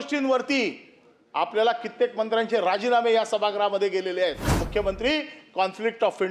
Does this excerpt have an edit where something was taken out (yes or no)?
yes